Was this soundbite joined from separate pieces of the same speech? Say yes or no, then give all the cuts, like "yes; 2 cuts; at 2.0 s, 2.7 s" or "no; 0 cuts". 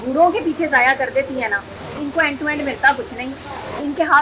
no; 0 cuts